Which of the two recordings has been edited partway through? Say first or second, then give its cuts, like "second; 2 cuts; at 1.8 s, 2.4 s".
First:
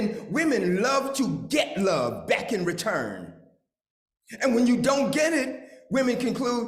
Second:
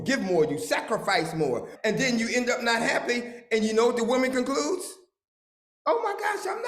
second; 1 cut; at 1.7 s